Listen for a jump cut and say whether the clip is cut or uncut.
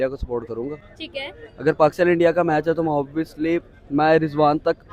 uncut